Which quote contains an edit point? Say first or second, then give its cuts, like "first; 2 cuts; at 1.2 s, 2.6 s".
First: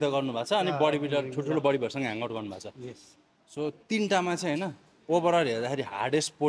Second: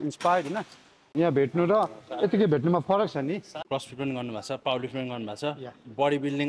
second; 2 cuts; at 1.1 s, 3.5 s